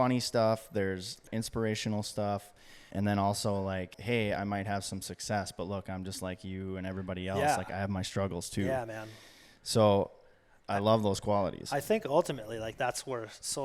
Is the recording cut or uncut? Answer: cut